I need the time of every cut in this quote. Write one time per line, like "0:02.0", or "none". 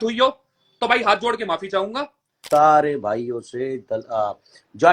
0:02.3